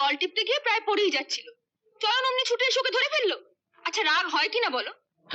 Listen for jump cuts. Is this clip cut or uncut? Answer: uncut